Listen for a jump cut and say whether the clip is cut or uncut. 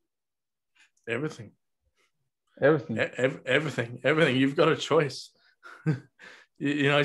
uncut